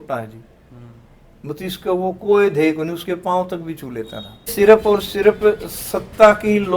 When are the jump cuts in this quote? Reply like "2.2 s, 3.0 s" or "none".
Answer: 4.5 s